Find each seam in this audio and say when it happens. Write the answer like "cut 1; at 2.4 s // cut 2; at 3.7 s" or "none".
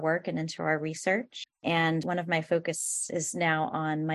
cut 1; at 1.9 s // cut 2; at 2.9 s